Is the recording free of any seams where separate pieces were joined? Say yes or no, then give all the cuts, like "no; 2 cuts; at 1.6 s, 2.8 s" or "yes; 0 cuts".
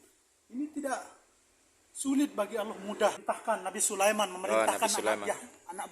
no; 1 cut; at 3.2 s